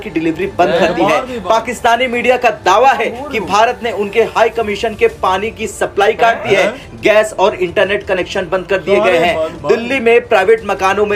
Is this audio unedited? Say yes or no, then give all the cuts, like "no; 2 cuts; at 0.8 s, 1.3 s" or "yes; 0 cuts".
yes; 0 cuts